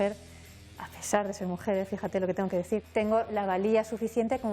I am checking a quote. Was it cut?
yes; 1 cut; at 2.8 s

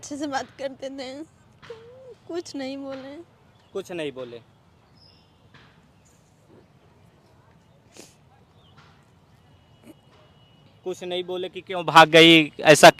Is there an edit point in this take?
no; 0 cuts

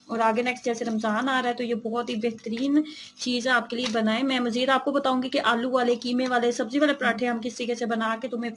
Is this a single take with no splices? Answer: yes; 0 cuts

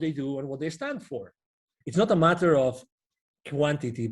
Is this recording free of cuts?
no; 1 cut; at 1.7 s

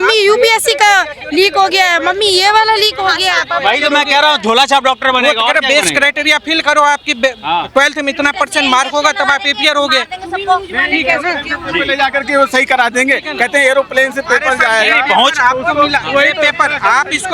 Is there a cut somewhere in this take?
no; 0 cuts

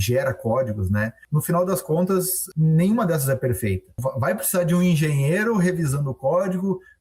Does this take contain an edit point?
yes; 3 cuts; at 1.2 s, 2.4 s, 3.9 s

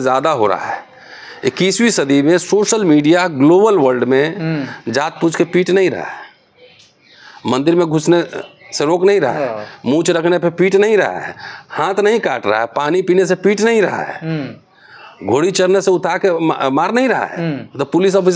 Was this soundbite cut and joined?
no; 0 cuts

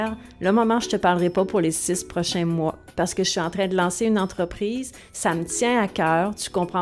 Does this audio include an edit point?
no; 0 cuts

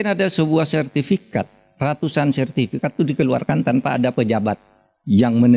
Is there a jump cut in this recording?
no; 0 cuts

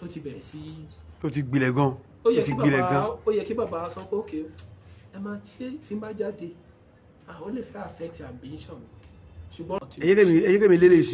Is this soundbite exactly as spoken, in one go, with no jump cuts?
no; 1 cut; at 9.7 s

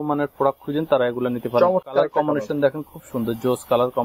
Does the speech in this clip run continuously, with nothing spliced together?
yes; 0 cuts

